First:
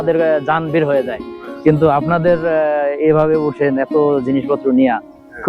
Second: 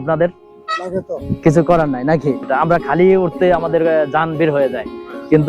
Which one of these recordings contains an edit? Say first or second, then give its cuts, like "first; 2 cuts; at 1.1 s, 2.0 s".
second; 2 cuts; at 1.2 s, 2.4 s